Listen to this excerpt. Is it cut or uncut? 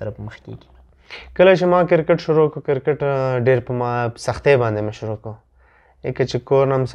uncut